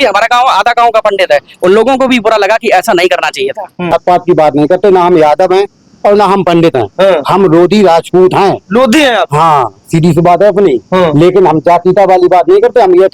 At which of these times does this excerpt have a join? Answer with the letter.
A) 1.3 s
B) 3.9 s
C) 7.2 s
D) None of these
B